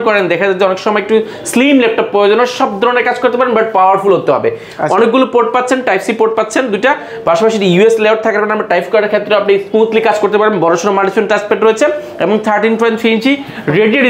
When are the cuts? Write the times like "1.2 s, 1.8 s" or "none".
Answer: none

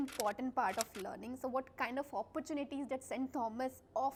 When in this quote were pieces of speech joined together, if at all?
none

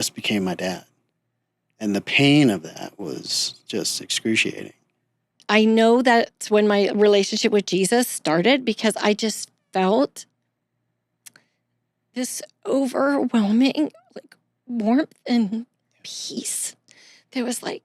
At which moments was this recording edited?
5.3 s

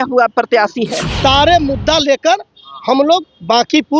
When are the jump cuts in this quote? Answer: 1.2 s

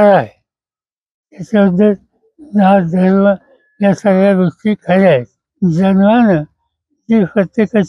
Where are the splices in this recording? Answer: 5.4 s

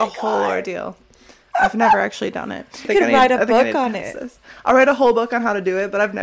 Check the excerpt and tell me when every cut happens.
2.9 s

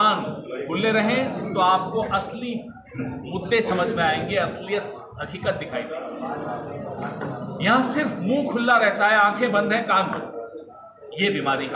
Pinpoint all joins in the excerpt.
none

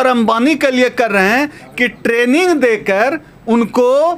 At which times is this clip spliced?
none

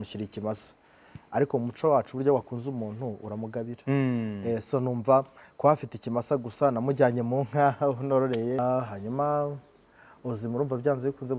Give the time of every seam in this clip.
8.6 s

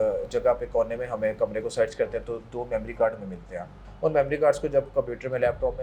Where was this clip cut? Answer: 3.8 s

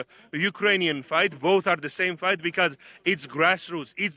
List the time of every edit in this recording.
none

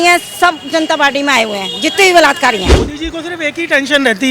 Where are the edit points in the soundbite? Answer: 2.8 s

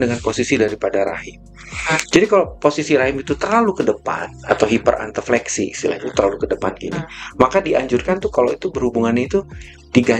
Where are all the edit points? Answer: none

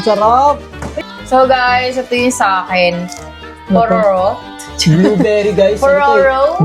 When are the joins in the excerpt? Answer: 1.0 s

